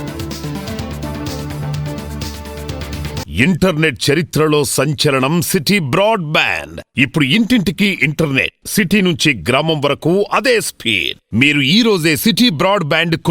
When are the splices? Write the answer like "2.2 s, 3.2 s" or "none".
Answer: 3.3 s